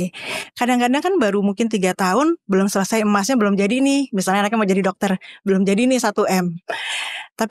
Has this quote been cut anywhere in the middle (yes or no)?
no